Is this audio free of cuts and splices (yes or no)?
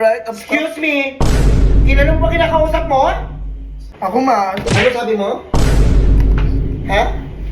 no